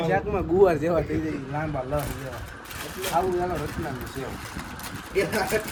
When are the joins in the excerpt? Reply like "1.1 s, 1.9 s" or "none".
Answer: none